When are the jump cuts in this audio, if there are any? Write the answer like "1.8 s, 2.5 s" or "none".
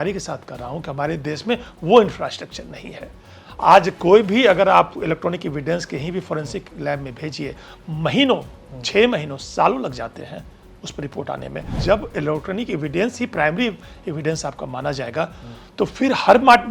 11.7 s